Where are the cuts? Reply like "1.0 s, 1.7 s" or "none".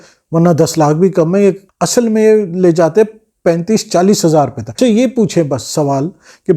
1.7 s, 4.8 s

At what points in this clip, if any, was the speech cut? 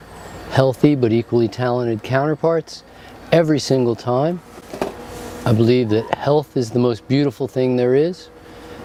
none

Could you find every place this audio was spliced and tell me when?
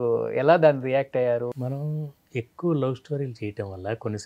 1.5 s

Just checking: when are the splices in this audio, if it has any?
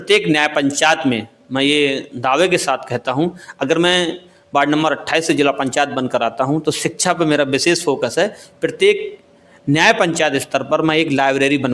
none

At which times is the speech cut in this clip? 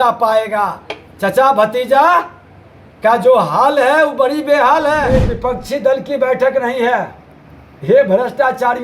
5.1 s

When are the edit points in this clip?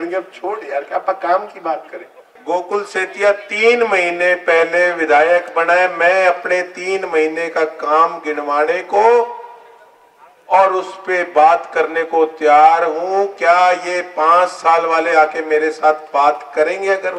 2.3 s

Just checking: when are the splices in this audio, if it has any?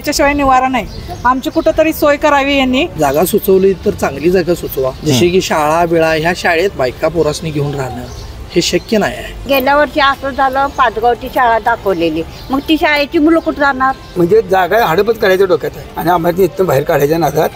2.9 s, 5.0 s, 6.7 s, 9.4 s, 14.1 s, 15.9 s

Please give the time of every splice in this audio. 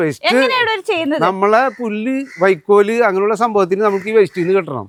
none

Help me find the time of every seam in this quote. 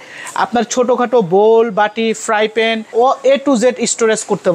2.8 s

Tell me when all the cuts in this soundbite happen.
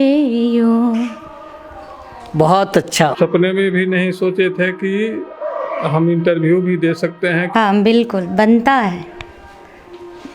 3.1 s, 7.4 s

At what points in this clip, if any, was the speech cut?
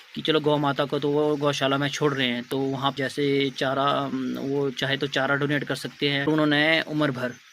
2.9 s, 6.3 s

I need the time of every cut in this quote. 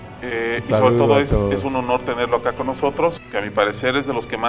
none

